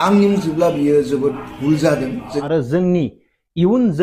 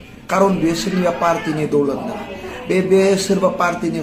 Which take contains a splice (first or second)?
first